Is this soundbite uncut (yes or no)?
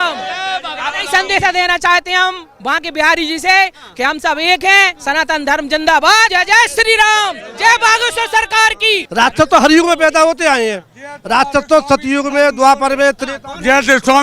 no